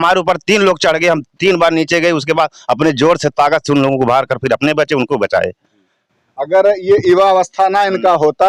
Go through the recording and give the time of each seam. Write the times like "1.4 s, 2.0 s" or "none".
none